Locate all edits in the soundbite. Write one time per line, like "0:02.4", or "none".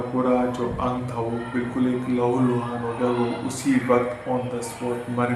none